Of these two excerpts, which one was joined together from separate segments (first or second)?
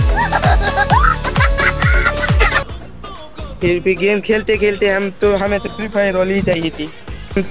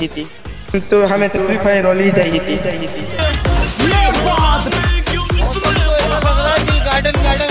first